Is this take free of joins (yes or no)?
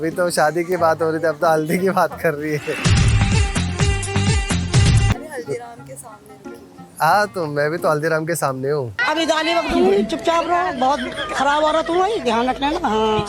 no